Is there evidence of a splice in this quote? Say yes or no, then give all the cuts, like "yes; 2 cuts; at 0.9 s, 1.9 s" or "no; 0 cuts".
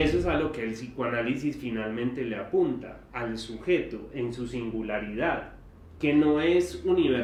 no; 0 cuts